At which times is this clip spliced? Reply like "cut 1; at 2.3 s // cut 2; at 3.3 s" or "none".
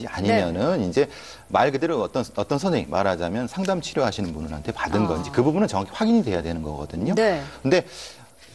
none